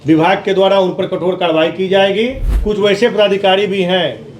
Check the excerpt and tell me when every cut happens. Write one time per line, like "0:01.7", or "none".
0:02.5